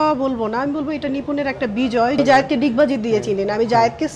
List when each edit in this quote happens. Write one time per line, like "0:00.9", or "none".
0:02.2

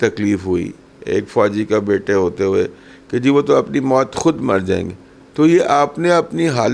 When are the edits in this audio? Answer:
none

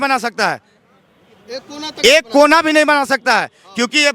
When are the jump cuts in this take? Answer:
none

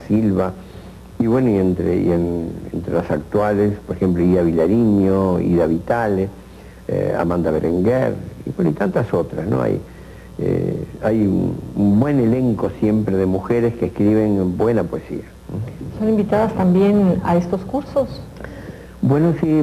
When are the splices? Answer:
0:14.6

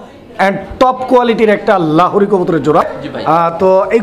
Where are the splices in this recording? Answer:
0:03.0

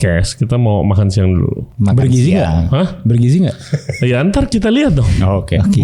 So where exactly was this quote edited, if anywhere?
0:01.6

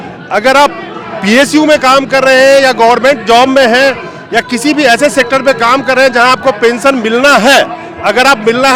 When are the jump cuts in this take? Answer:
none

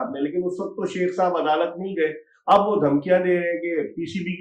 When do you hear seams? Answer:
none

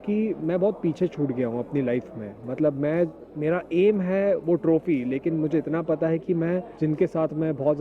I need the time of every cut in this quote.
0:02.4
0:06.7

